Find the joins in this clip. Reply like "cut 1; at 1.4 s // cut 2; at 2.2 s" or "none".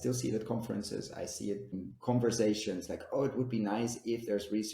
cut 1; at 1.8 s

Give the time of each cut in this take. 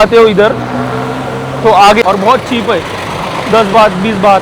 cut 1; at 2.0 s

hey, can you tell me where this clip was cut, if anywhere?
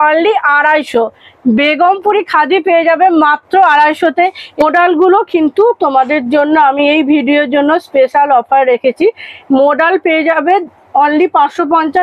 cut 1; at 4.6 s

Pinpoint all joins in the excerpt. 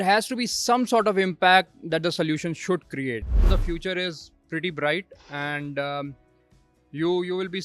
cut 1; at 3.4 s

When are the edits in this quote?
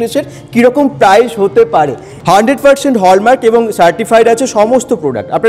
cut 1; at 2.1 s

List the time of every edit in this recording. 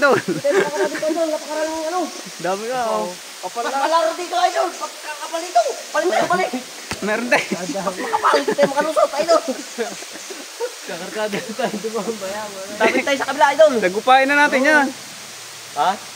none

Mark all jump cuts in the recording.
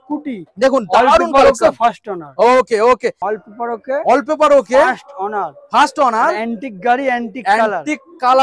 cut 1; at 3.2 s

